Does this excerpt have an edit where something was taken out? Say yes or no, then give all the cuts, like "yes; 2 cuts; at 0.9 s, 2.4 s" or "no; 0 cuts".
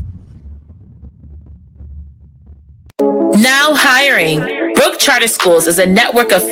yes; 1 cut; at 2.9 s